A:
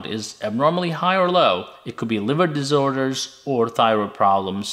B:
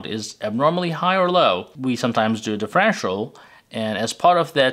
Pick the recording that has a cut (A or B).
A